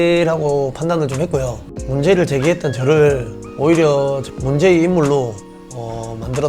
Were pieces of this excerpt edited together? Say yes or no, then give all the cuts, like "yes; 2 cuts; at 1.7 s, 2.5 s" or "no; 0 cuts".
yes; 1 cut; at 1.8 s